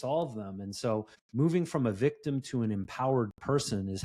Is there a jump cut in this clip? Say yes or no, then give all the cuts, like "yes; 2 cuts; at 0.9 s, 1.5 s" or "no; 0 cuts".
yes; 1 cut; at 1.2 s